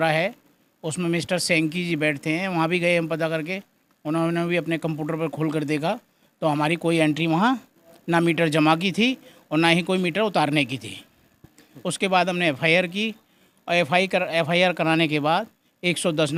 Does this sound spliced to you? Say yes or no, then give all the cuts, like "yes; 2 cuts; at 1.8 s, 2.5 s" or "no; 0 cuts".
no; 0 cuts